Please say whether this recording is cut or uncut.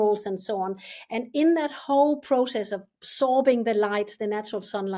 uncut